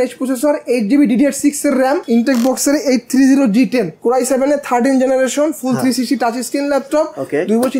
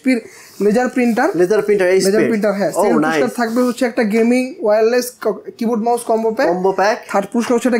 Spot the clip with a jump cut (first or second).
first